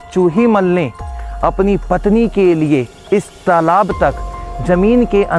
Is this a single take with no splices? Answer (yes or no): yes